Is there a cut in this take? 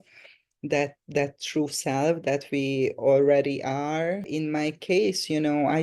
yes; 1 cut; at 4.3 s

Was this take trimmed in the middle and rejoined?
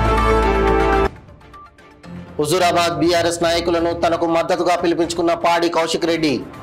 yes; 1 cut; at 1.0 s

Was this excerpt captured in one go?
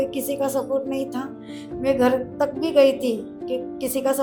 yes; 0 cuts

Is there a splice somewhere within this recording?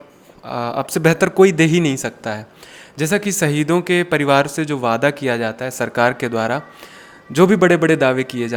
no; 0 cuts

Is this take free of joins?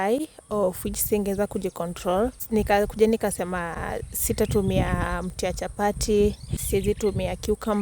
no; 2 cuts; at 2.4 s, 6.5 s

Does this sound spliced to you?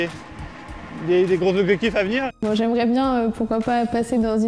yes; 1 cut; at 2.3 s

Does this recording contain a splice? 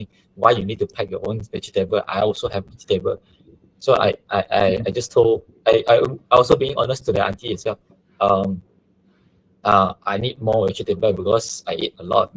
no; 0 cuts

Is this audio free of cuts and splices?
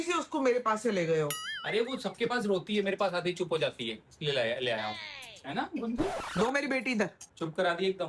yes; 0 cuts

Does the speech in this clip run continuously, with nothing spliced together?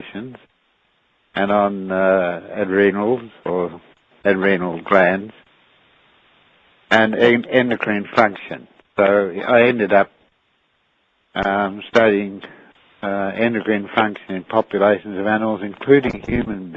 yes; 0 cuts

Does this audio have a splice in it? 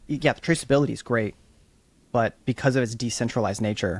no; 0 cuts

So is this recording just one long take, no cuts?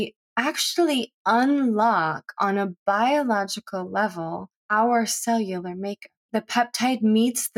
no; 1 cut; at 6.3 s

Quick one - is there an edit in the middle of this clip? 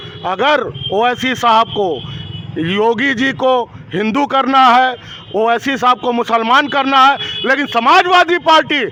no; 0 cuts

